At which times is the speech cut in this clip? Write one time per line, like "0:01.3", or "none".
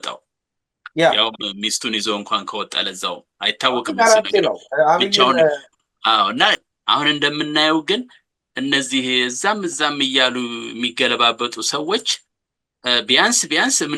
0:06.6